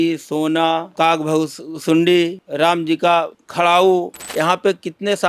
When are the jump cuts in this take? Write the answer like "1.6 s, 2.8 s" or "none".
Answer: 0.9 s, 2.4 s, 3.4 s, 4.2 s